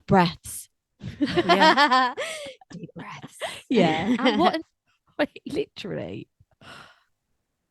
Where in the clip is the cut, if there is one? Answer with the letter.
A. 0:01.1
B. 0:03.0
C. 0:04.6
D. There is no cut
C